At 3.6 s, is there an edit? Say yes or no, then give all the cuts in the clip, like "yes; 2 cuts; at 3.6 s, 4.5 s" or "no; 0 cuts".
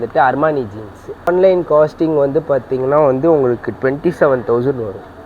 no; 1 cut; at 1.3 s